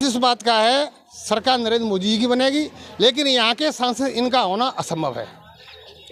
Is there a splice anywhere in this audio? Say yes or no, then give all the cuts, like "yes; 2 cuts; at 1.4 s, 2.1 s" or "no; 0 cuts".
no; 0 cuts